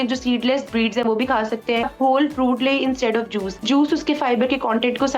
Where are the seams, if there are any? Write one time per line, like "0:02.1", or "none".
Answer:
0:01.9
0:03.6